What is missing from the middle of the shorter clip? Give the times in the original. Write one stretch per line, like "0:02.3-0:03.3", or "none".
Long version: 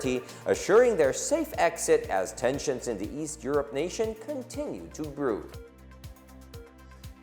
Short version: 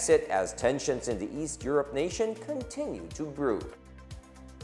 0:05.5-0:05.6